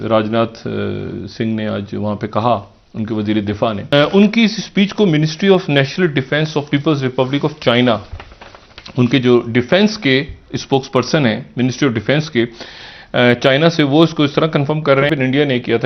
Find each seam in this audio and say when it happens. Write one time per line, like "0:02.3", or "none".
0:03.8
0:15.1